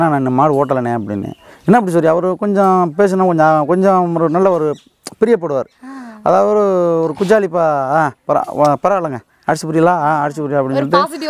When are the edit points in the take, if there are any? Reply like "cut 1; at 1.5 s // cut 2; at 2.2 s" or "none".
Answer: none